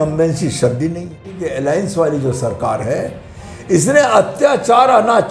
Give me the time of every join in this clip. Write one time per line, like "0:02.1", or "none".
0:01.4